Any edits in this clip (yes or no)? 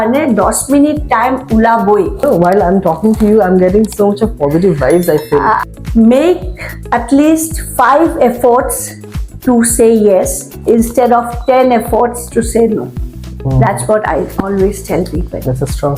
yes